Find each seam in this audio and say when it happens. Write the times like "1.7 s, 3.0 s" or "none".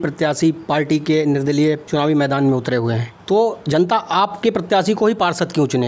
1.8 s, 3.1 s